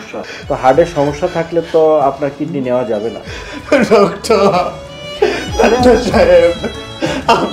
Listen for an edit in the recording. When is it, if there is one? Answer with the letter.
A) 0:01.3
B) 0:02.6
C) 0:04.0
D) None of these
D